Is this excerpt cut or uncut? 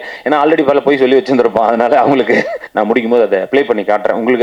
cut